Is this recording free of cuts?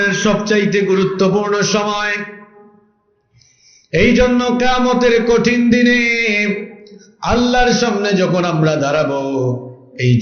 yes; 0 cuts

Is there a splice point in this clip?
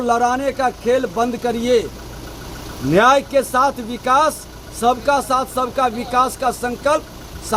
no; 0 cuts

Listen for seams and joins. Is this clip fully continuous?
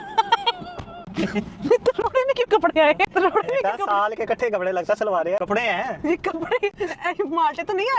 yes; 0 cuts

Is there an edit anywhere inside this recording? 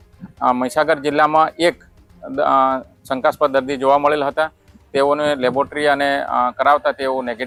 no; 0 cuts

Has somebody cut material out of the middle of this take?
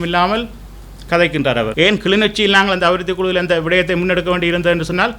yes; 1 cut; at 1.7 s

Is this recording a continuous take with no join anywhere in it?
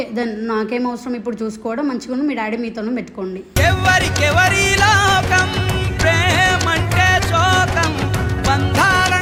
yes; 0 cuts

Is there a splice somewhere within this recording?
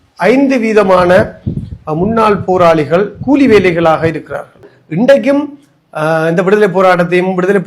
yes; 1 cut; at 4.8 s

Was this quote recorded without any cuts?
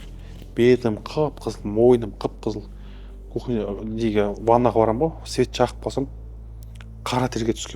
yes; 0 cuts

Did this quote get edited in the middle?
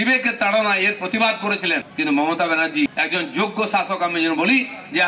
yes; 2 cuts; at 1.9 s, 2.9 s

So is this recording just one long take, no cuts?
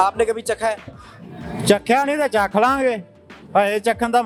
yes; 0 cuts

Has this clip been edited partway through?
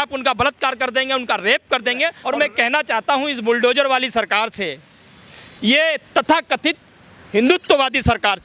yes; 1 cut; at 2.2 s

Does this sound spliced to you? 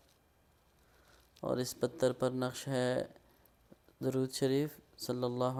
no; 0 cuts

